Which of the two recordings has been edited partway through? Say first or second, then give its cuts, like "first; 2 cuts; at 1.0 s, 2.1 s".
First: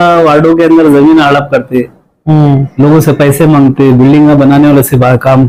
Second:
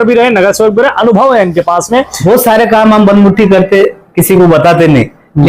second; 1 cut; at 2.2 s